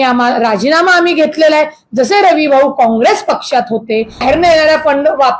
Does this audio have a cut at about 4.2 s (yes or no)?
yes